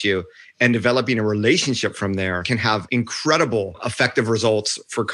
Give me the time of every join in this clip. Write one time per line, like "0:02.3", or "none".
0:02.8
0:03.9